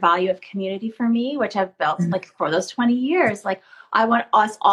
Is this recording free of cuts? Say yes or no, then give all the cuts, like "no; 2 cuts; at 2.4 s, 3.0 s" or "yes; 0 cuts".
yes; 0 cuts